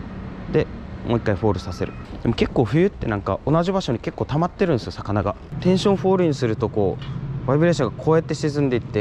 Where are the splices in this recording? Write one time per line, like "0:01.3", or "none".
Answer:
0:02.0
0:05.5